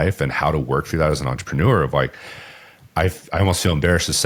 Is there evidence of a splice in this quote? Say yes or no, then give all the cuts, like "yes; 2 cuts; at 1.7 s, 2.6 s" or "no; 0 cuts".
no; 0 cuts